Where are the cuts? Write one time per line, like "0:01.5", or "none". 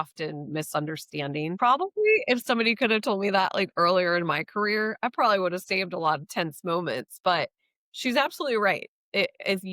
0:01.6